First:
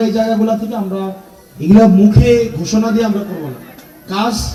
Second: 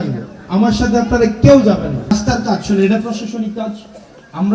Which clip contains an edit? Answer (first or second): second